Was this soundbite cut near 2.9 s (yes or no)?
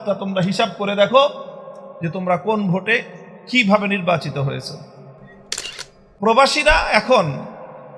no